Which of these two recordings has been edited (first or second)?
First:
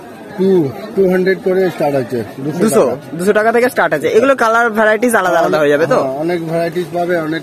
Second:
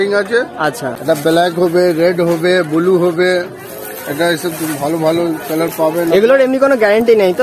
second